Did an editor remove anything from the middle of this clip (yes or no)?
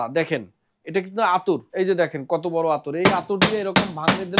yes